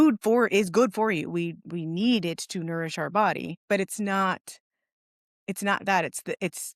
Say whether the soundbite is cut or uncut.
cut